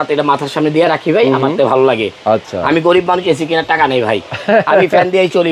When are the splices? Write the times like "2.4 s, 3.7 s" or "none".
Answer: none